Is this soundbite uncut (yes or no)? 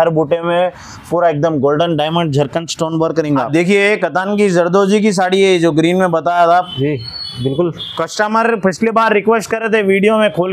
no